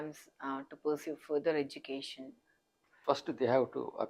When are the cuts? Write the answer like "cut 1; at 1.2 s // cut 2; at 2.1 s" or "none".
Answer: cut 1; at 3.0 s